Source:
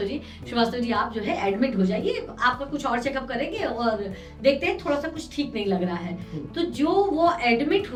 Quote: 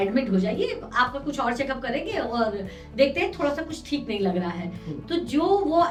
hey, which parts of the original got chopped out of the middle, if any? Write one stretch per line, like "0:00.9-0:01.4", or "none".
none